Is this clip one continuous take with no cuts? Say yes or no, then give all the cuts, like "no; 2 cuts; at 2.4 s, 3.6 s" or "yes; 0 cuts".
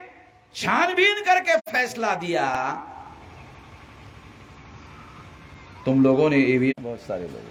yes; 0 cuts